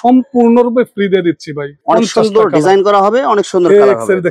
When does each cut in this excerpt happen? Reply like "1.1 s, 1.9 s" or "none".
1.8 s